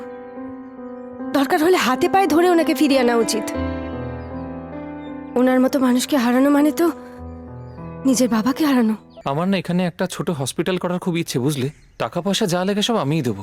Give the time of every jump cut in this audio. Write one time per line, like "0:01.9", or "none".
0:09.1